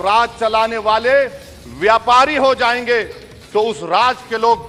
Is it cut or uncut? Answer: uncut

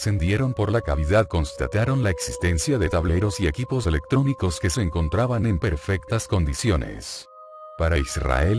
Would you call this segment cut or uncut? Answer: uncut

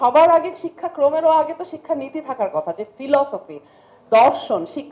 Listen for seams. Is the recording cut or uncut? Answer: uncut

